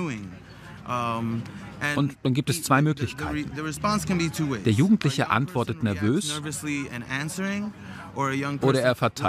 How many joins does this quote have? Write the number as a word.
zero